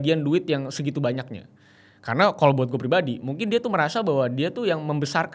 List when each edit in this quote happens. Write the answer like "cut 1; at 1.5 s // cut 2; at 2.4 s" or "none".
none